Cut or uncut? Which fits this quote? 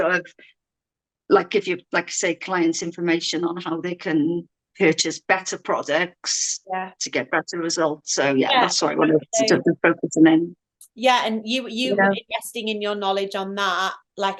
uncut